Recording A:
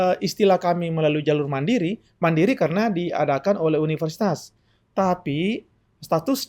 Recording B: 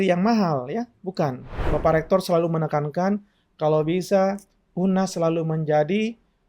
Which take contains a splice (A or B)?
B